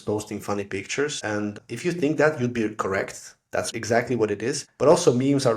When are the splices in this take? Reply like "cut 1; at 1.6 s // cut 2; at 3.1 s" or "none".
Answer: cut 1; at 1.4 s // cut 2; at 3.7 s // cut 3; at 4.7 s